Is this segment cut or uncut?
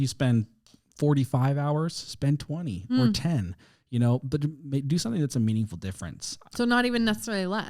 uncut